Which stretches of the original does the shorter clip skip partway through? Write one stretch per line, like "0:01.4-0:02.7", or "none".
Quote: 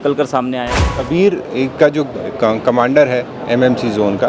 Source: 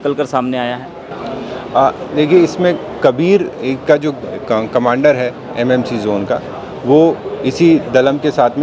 0:01.1-0:03.2